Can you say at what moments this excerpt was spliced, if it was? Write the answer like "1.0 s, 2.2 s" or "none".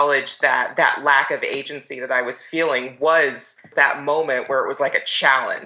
3.7 s

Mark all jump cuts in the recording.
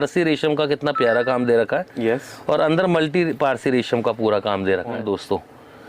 4.9 s

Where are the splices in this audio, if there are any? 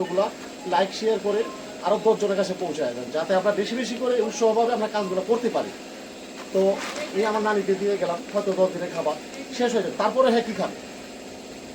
none

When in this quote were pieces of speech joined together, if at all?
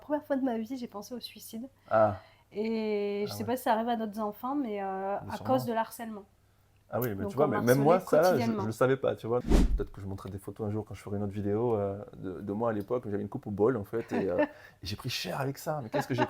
9.5 s

